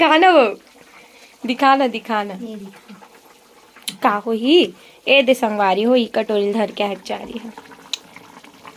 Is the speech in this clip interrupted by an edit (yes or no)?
no